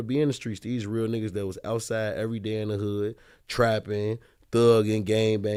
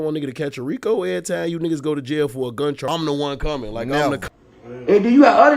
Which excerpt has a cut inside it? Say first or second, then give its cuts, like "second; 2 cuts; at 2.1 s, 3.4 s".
second; 2 cuts; at 2.8 s, 4.3 s